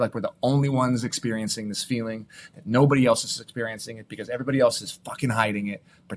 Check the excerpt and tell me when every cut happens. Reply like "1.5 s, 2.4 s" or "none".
none

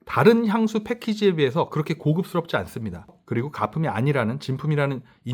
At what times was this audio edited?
3.2 s

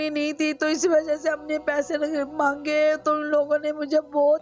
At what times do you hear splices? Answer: none

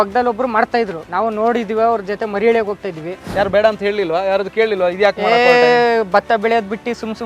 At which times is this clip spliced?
1.0 s, 3.2 s

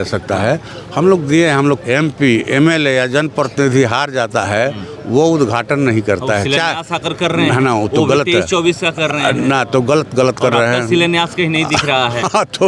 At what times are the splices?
1.8 s

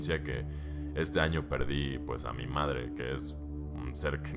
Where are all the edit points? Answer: none

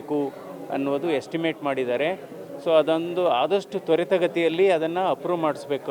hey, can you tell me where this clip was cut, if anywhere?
none

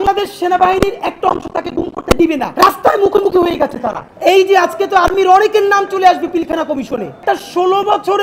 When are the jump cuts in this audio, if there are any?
4.1 s, 7.2 s

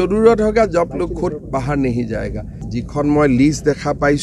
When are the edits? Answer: 2.6 s

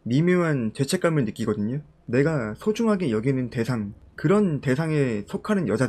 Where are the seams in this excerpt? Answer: 1.9 s

